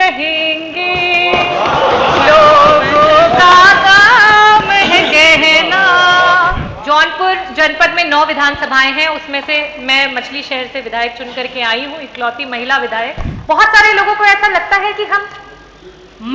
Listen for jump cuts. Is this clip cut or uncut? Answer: cut